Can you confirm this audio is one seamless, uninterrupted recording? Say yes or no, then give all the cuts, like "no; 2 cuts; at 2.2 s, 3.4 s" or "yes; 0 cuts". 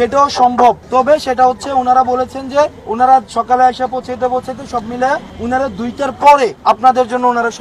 no; 4 cuts; at 1.3 s, 2.8 s, 5.3 s, 6.6 s